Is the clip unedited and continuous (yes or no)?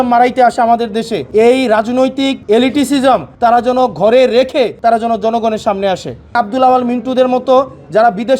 no